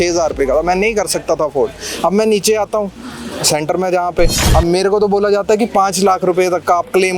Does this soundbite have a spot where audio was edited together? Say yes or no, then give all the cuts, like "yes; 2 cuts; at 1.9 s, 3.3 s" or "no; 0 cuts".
yes; 1 cut; at 4.4 s